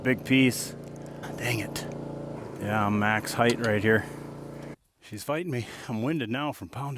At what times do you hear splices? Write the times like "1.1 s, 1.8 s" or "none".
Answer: 4.7 s